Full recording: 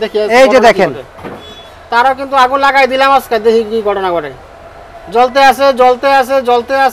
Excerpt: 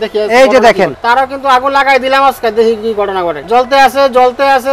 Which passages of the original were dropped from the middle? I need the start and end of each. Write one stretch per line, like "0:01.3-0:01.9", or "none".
0:01.0-0:01.8
0:04.3-0:05.0